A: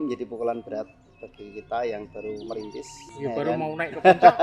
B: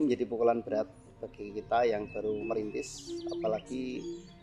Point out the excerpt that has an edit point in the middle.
A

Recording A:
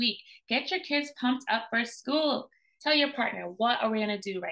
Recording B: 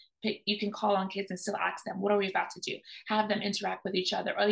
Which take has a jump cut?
A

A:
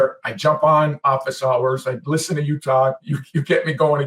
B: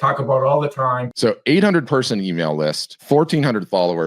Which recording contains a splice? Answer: B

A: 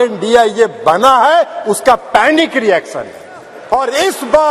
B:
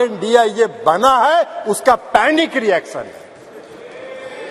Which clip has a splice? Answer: A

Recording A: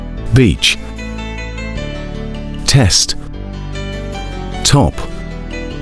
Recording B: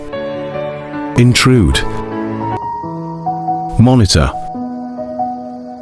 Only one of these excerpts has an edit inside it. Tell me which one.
B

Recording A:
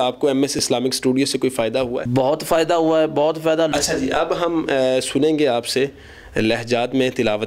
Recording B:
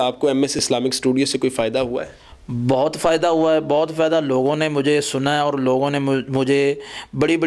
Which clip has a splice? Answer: A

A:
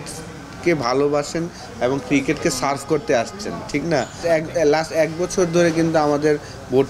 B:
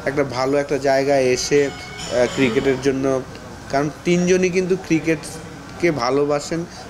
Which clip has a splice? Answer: A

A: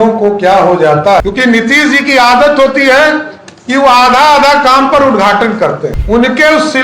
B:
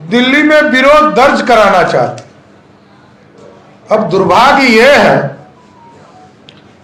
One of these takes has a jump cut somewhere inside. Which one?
A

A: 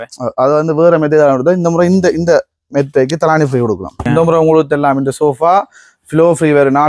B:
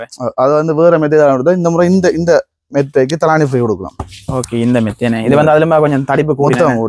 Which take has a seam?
A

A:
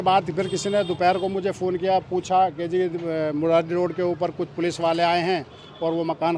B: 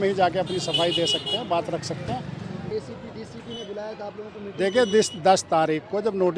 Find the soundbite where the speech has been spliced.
B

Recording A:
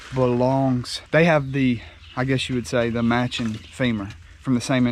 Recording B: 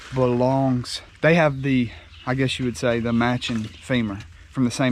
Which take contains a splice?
A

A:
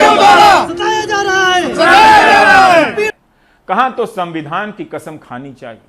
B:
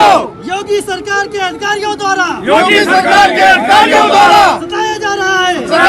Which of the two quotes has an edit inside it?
A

